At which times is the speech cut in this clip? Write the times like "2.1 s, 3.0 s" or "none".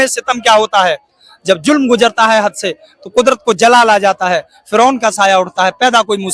none